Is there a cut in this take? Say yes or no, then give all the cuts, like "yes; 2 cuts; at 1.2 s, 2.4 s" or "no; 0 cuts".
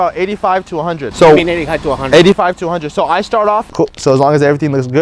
yes; 2 cuts; at 1.0 s, 3.6 s